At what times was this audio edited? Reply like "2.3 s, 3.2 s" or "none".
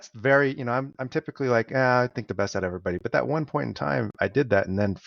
none